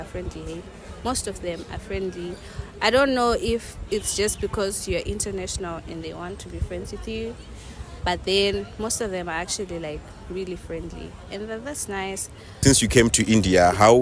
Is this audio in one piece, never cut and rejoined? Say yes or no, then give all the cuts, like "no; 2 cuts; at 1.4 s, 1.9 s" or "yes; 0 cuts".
no; 1 cut; at 12.6 s